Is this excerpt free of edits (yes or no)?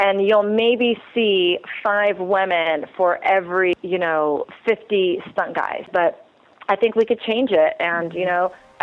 no